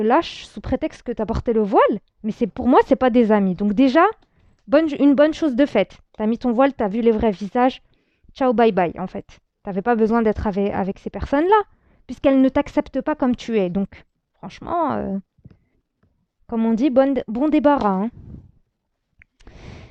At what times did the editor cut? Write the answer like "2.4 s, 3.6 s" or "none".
none